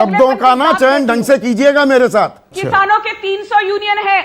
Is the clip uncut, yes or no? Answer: no